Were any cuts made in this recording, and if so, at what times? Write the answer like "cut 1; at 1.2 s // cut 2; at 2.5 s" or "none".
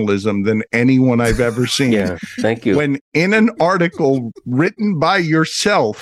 none